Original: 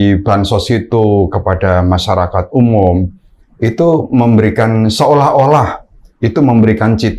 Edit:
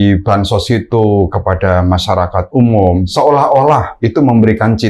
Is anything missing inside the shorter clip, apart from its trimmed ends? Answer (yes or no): yes